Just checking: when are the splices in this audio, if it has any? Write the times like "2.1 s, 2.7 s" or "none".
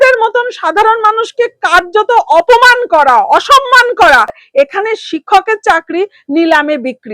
4.4 s